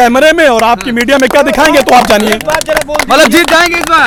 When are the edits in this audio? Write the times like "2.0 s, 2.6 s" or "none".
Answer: none

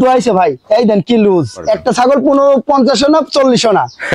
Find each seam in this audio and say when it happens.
1.6 s

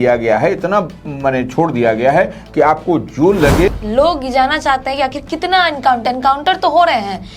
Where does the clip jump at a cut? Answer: 3.7 s

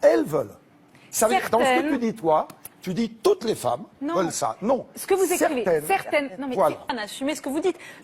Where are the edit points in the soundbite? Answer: 1.0 s, 6.9 s

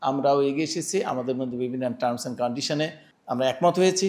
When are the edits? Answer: 3.1 s

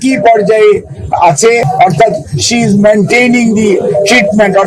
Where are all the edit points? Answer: 1.7 s

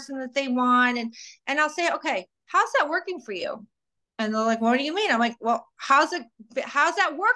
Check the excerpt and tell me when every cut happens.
none

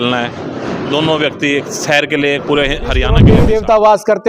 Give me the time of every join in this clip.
3.2 s

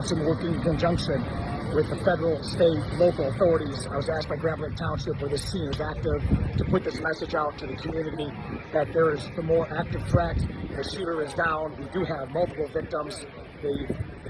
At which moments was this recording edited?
none

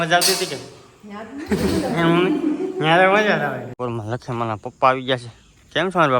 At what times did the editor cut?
3.7 s

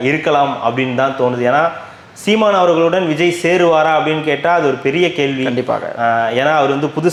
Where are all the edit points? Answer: none

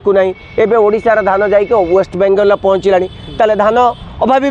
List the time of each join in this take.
none

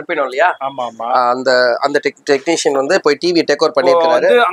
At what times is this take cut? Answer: none

